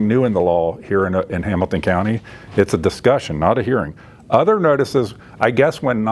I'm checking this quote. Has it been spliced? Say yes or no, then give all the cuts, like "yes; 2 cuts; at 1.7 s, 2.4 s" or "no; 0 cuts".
no; 0 cuts